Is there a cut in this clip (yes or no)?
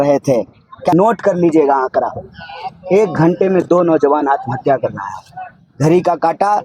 yes